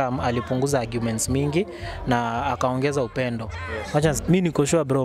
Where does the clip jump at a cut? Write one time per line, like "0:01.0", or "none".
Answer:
0:04.2